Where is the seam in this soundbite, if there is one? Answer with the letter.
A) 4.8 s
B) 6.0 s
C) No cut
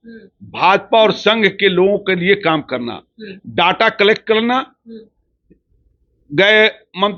C